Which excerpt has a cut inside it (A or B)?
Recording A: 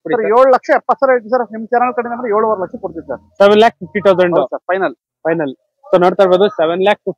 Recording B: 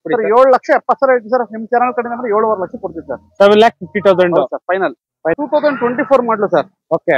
B